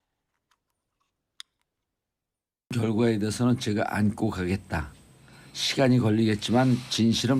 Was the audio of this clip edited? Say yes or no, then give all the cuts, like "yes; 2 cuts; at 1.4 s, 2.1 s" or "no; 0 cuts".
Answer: no; 0 cuts